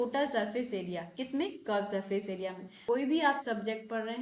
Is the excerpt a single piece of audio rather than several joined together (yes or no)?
no